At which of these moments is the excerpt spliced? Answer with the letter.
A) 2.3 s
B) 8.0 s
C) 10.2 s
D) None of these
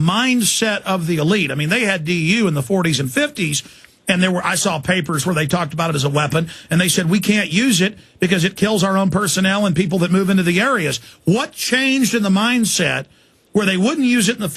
C